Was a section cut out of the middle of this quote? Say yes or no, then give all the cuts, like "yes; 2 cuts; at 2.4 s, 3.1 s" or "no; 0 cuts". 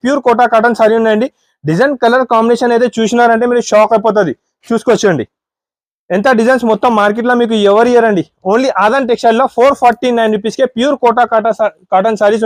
no; 0 cuts